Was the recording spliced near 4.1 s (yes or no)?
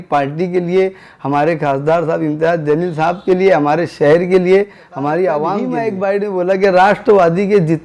no